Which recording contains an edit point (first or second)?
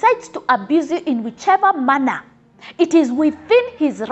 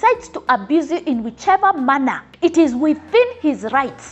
second